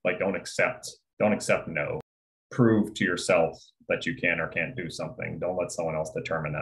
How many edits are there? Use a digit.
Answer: 1